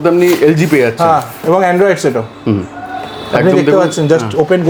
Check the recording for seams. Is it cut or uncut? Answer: uncut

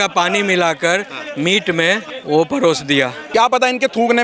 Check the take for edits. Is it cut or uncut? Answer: cut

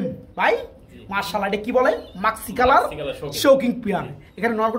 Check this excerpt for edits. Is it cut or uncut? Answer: uncut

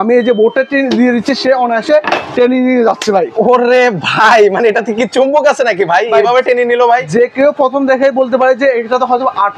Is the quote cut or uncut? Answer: uncut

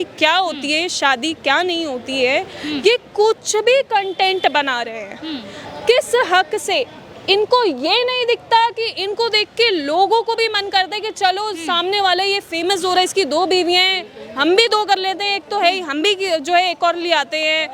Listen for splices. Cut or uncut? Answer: uncut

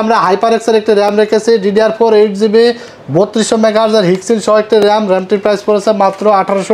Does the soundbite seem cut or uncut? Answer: uncut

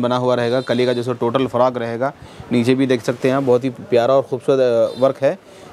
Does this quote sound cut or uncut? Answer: uncut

